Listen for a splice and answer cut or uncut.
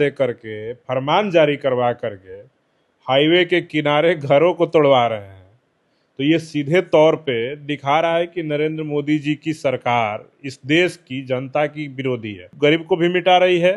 cut